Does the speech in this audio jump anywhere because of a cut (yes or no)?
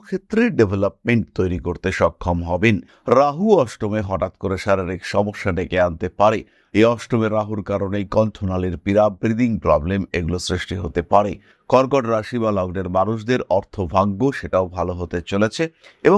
yes